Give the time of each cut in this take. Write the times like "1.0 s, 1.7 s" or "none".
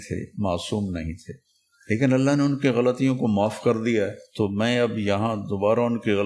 none